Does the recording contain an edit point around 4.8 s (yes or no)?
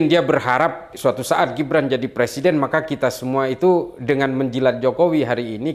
no